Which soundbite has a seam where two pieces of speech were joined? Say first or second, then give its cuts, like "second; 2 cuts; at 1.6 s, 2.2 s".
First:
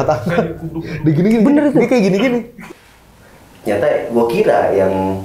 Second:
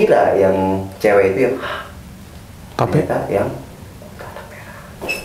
first; 1 cut; at 2.6 s